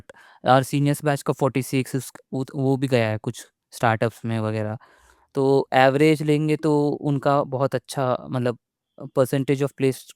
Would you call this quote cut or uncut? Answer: uncut